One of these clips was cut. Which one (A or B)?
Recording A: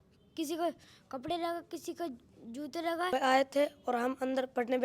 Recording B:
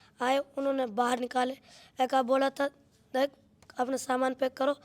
A